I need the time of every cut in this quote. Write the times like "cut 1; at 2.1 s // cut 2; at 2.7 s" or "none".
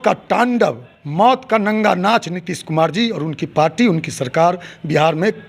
none